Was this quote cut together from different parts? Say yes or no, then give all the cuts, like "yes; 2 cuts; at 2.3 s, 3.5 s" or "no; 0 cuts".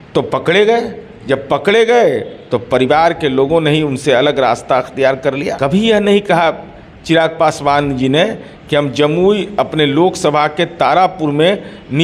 yes; 1 cut; at 5.6 s